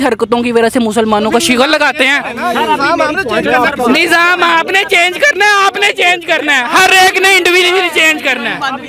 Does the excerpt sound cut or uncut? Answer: uncut